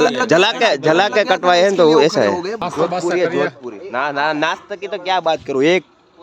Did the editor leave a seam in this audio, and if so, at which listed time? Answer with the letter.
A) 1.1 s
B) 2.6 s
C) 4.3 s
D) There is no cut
B